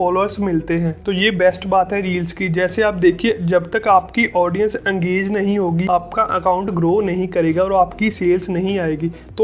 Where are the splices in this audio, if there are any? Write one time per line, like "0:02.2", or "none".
none